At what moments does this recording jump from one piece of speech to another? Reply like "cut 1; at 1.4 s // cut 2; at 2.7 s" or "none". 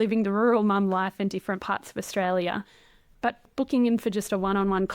cut 1; at 3.5 s